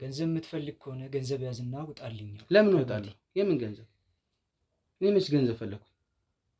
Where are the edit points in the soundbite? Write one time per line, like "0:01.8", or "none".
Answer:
none